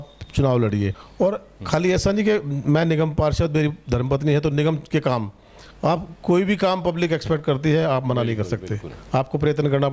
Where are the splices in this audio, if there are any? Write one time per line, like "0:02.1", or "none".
0:01.0